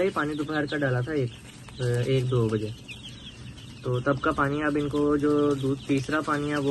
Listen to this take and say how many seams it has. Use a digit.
0